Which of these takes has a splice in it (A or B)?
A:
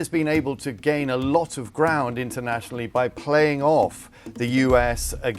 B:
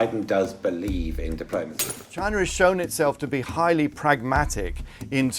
B